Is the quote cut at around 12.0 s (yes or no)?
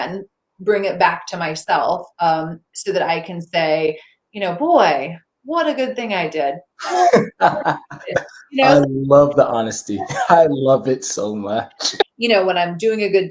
yes